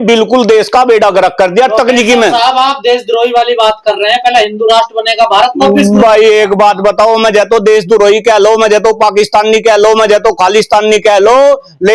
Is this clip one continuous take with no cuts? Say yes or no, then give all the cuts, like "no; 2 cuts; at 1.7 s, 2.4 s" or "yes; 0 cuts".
yes; 0 cuts